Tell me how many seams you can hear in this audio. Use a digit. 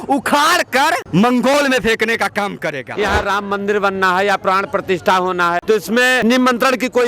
2